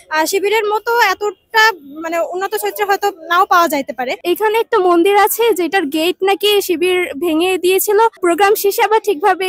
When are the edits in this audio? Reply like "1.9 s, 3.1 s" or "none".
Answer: 4.2 s, 8.2 s